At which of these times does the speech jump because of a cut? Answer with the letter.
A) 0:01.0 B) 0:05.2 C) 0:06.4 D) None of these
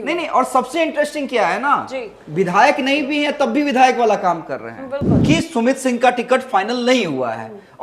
B